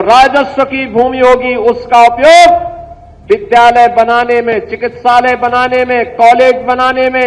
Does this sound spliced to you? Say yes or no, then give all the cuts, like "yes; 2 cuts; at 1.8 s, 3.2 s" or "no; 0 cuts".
no; 0 cuts